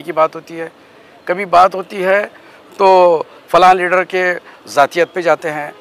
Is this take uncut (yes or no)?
yes